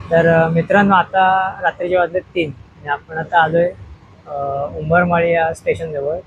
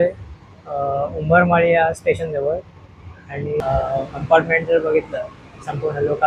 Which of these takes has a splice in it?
second; 1 cut; at 3.6 s

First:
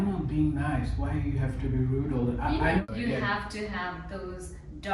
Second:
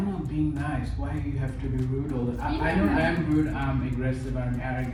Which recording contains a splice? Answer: first; 1 cut; at 2.8 s

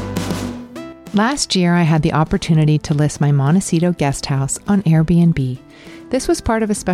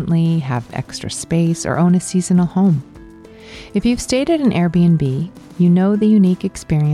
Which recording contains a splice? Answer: first; 1 cut; at 1.0 s

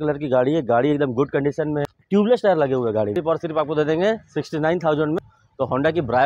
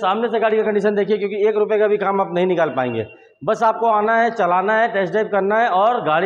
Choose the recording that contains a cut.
first; 3 cuts; at 1.9 s, 3.1 s, 5.2 s

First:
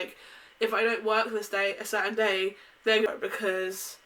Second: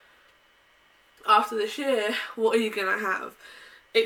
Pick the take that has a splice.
first; 1 cut; at 3.1 s

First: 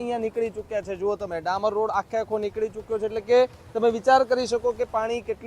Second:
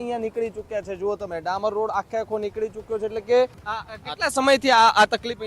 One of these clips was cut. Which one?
second; 1 cut; at 3.6 s

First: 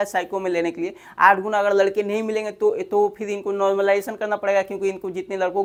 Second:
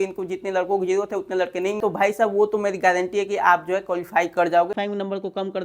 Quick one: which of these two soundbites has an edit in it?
second; 2 cuts; at 1.8 s, 4.7 s

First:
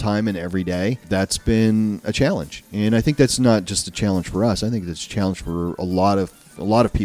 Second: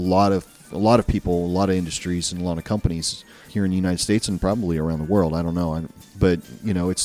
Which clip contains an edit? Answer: first; 1 cut; at 1.0 s

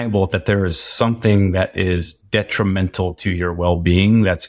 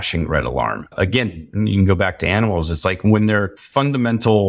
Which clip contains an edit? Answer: second; 2 cuts; at 0.9 s, 3.6 s

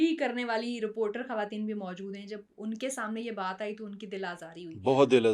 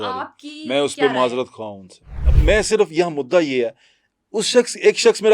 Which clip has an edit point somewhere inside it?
second; 1 cut; at 2.3 s

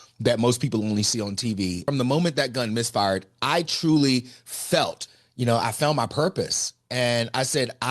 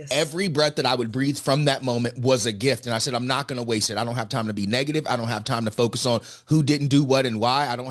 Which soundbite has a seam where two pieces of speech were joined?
first; 2 cuts; at 1.8 s, 5.0 s

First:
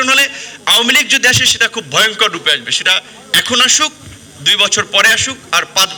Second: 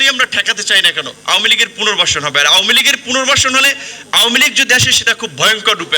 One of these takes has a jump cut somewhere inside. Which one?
second; 1 cut; at 1.1 s

